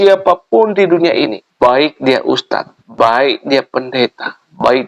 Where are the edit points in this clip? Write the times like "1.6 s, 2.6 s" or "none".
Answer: 1.4 s, 2.8 s